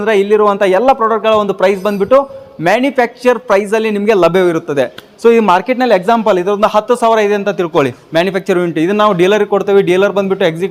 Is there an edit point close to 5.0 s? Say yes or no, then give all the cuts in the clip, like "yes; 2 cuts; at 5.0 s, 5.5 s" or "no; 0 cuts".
no; 0 cuts